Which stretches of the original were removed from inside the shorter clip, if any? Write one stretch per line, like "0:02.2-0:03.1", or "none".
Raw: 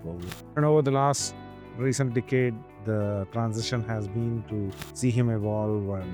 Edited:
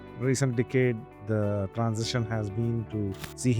none